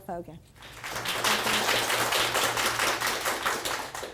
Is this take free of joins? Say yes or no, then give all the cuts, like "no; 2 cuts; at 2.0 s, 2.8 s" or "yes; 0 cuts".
no; 1 cut; at 1.2 s